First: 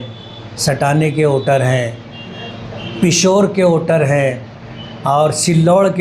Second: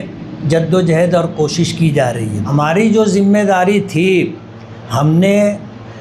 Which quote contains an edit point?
second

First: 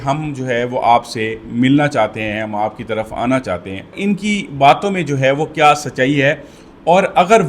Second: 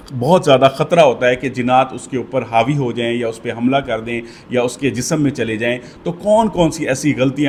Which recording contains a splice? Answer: first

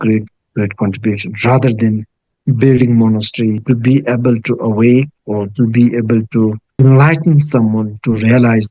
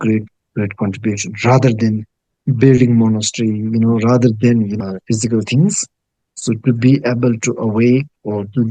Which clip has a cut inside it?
first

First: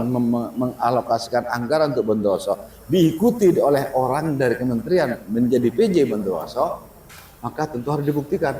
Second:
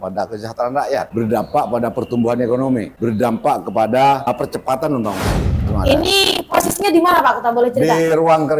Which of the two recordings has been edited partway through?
second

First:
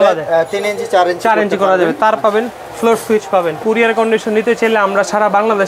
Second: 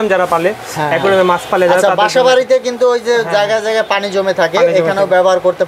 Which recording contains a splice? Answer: first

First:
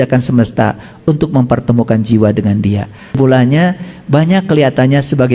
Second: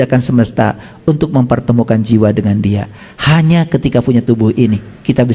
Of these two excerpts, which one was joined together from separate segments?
first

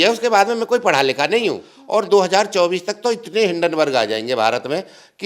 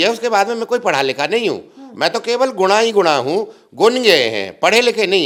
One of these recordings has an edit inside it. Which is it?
first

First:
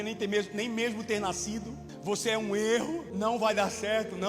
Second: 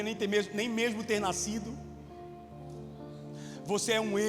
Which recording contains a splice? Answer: first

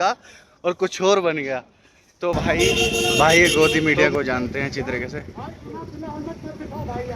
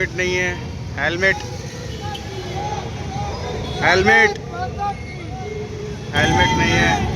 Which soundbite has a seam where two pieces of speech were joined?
first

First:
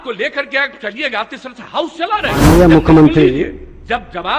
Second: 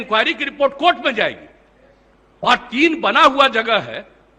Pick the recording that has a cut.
first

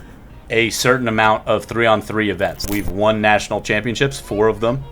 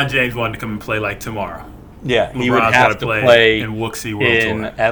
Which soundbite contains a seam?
first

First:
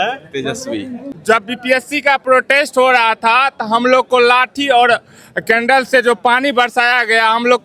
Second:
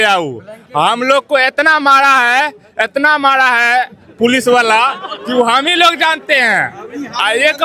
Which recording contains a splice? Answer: first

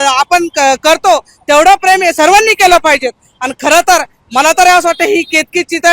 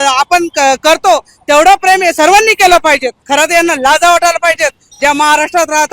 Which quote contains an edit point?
second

